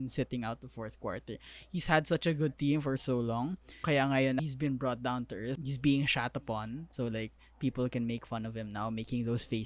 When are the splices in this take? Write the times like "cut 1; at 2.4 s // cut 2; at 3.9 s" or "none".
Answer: cut 1; at 3.8 s // cut 2; at 4.4 s // cut 3; at 5.6 s